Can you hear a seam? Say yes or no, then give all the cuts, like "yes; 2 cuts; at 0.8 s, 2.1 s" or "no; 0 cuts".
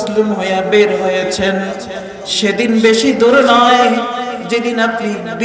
no; 0 cuts